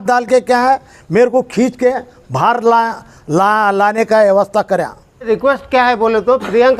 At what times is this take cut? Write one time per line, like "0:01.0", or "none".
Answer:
0:05.2